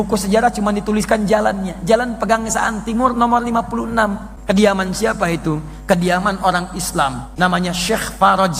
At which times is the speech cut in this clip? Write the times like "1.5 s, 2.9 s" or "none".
4.3 s, 7.2 s